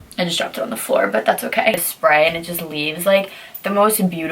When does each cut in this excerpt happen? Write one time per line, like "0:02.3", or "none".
0:01.9